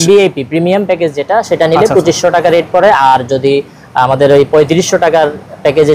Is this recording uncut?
yes; 0 cuts

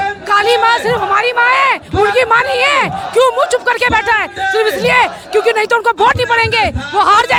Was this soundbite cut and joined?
no; 0 cuts

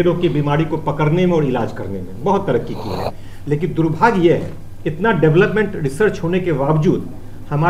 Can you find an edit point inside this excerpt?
no; 0 cuts

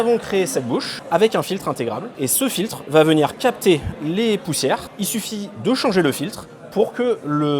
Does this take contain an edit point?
yes; 3 cuts; at 0.9 s, 2.1 s, 4.9 s

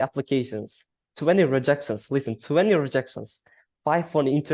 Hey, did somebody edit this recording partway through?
no; 0 cuts

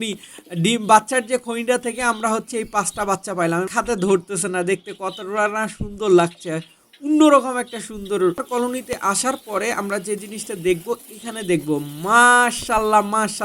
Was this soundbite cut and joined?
yes; 2 cuts; at 3.7 s, 8.5 s

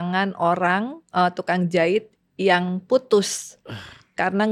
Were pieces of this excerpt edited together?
no; 0 cuts

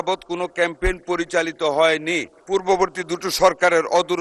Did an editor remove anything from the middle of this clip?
yes; 1 cut; at 2.3 s

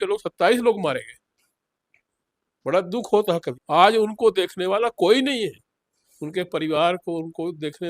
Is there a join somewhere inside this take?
yes; 1 cut; at 3.5 s

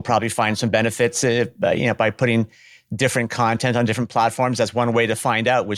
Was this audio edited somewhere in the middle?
no; 0 cuts

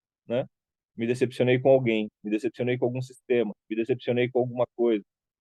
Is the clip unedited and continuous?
yes; 0 cuts

